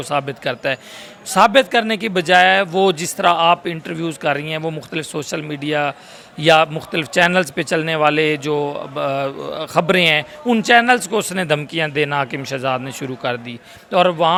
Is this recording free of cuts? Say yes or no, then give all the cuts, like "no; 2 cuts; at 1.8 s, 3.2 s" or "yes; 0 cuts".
yes; 0 cuts